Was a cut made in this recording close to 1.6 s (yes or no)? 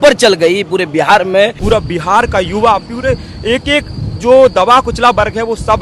yes